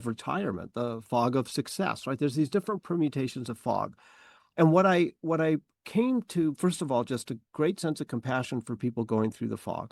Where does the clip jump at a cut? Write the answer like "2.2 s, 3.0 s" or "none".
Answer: none